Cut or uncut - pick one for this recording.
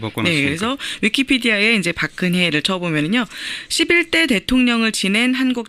cut